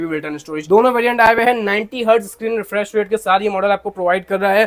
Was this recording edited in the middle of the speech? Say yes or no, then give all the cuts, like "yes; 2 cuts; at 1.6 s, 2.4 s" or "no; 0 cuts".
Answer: no; 0 cuts